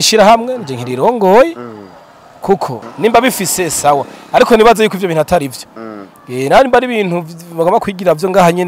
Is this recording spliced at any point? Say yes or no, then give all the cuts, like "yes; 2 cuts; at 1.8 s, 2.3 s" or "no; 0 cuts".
yes; 1 cut; at 2.8 s